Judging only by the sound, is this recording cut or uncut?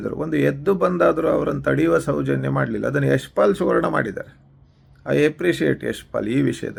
uncut